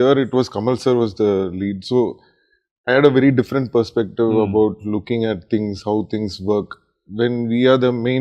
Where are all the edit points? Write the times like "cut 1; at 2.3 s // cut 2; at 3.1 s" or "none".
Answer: none